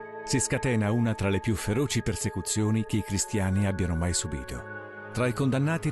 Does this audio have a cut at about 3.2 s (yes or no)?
no